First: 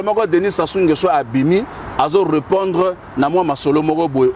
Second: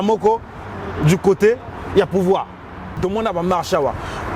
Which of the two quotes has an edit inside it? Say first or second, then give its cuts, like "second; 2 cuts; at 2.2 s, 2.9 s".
second; 1 cut; at 2.9 s